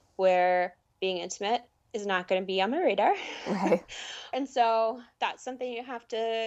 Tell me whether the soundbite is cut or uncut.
cut